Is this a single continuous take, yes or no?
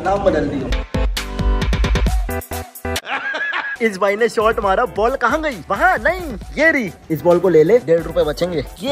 yes